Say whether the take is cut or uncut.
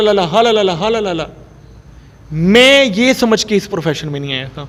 uncut